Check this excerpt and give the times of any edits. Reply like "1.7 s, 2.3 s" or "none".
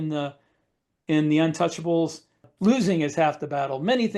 2.5 s